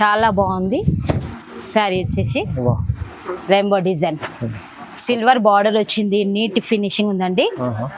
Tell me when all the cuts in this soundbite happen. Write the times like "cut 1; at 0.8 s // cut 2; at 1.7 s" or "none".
none